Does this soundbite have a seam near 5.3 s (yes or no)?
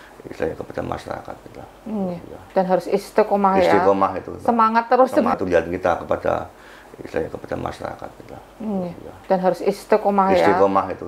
yes